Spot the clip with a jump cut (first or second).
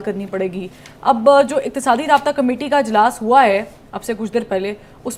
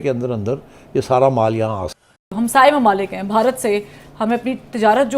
second